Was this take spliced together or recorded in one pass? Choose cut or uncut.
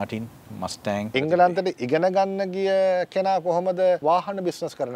cut